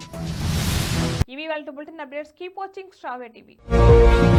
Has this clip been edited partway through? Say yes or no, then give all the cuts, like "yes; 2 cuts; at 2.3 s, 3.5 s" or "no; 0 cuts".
no; 0 cuts